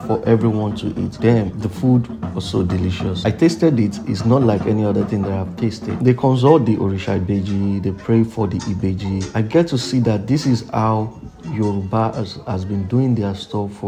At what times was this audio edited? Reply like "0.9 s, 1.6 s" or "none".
none